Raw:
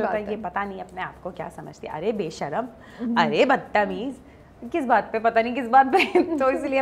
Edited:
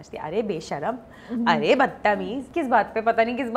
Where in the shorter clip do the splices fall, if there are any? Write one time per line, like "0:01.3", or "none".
0:02.4